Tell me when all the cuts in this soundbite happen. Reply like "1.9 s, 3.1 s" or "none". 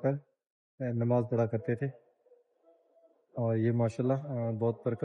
none